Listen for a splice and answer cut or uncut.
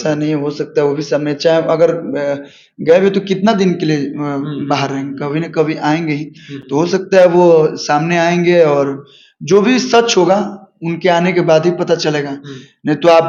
uncut